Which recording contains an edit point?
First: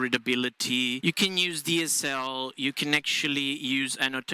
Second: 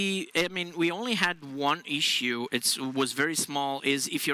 first; 1 cut; at 1.0 s

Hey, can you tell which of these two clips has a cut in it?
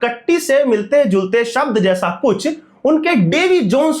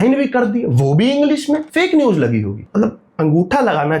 second; 2 cuts; at 1.7 s, 2.6 s

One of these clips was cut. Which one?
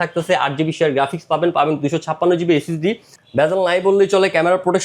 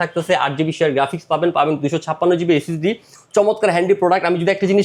first; 1 cut; at 3.1 s

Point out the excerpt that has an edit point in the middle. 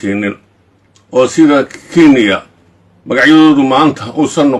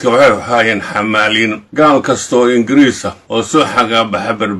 second; 2 cuts; at 1.6 s, 3.5 s

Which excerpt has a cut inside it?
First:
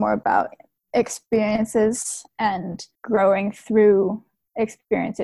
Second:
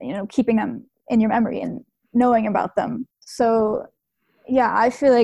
first; 1 cut; at 2.9 s

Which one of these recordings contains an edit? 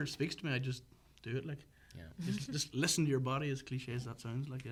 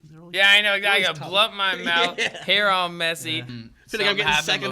second; 1 cut; at 3.5 s

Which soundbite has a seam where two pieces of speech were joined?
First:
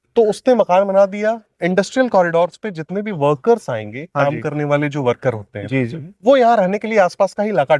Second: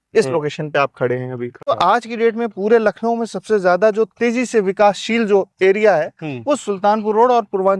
second; 1 cut; at 1.7 s

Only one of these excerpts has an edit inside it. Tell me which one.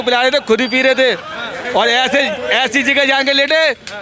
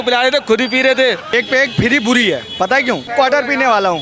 second; 2 cuts; at 1.3 s, 3.1 s

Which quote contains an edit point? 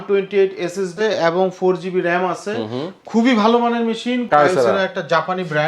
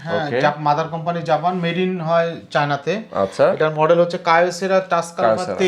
first; 2 cuts; at 0.9 s, 4.3 s

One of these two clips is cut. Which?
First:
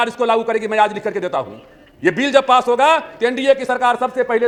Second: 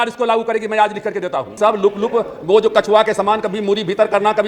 second; 1 cut; at 1.5 s

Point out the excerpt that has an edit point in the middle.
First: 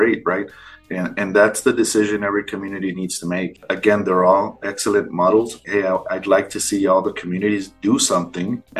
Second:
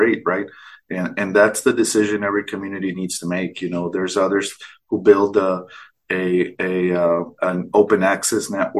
first; 2 cuts; at 3.6 s, 5.6 s

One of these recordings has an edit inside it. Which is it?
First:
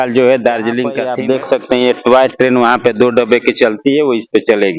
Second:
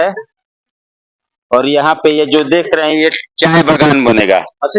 first; 1 cut; at 1.0 s

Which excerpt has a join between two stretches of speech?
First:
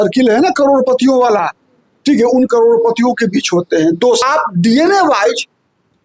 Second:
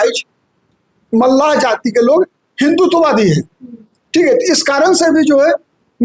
first; 1 cut; at 4.2 s

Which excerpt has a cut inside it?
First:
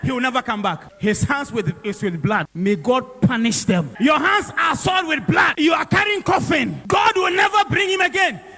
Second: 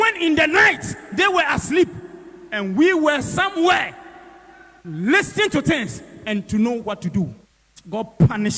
first; 5 cuts; at 0.9 s, 2.5 s, 3.9 s, 5.5 s, 6.8 s

